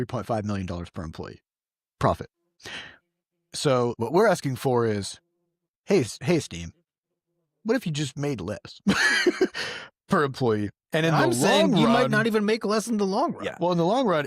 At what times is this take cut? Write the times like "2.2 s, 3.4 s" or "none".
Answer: 2.6 s, 4.0 s